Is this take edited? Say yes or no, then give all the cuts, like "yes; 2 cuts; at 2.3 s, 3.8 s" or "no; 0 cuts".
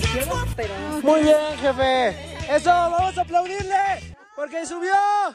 no; 0 cuts